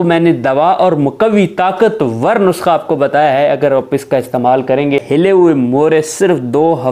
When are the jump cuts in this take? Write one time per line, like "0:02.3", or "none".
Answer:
0:05.0